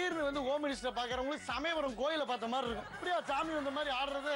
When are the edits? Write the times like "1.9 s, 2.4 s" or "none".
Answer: 2.9 s